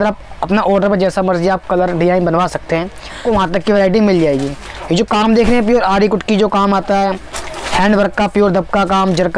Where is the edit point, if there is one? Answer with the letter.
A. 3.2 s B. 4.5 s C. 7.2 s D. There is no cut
A